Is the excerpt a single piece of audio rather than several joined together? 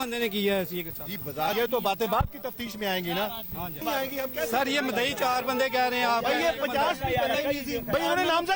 no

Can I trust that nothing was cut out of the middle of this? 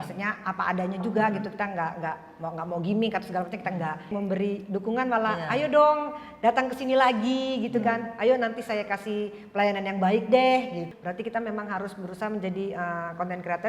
no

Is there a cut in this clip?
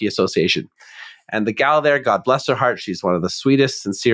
no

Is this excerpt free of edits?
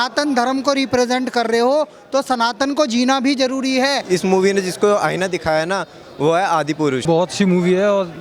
no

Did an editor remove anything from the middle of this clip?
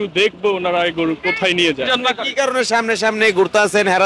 yes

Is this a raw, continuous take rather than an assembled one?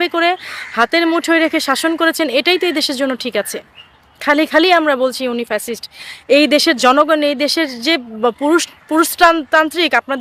yes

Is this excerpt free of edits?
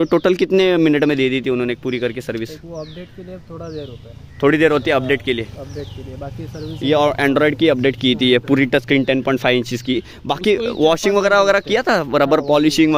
yes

